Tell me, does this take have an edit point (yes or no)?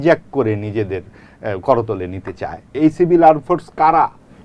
yes